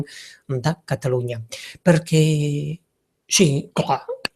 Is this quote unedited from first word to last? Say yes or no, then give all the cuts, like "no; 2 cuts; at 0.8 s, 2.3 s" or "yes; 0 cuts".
no; 1 cut; at 1.2 s